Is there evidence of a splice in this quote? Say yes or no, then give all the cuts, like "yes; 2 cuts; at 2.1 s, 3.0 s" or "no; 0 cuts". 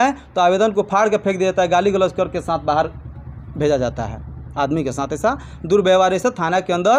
no; 0 cuts